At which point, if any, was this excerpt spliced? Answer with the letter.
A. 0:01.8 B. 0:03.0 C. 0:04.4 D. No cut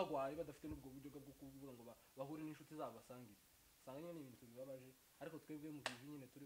D